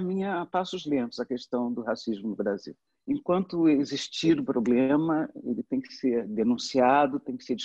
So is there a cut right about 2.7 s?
yes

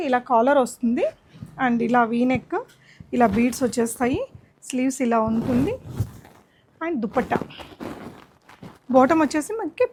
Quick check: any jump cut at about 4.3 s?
no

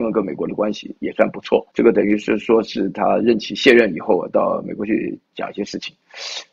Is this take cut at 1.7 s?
yes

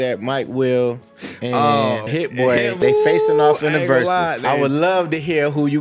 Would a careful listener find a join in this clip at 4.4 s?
yes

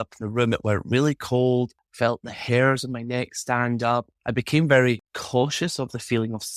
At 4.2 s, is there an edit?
yes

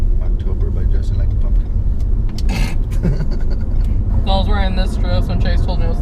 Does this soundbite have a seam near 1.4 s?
no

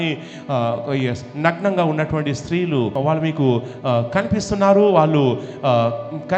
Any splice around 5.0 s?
no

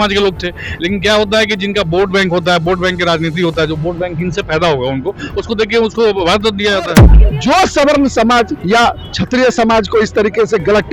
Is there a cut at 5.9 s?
no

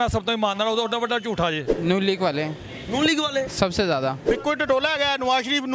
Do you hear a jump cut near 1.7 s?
yes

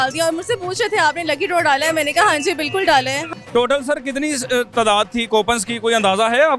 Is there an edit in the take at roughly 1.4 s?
no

